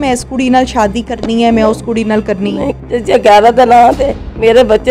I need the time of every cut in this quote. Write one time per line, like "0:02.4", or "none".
0:02.8